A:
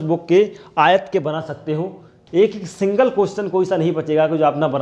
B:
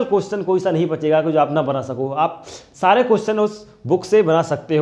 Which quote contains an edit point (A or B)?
A